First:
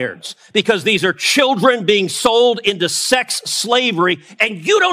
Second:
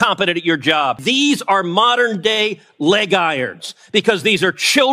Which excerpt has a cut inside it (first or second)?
second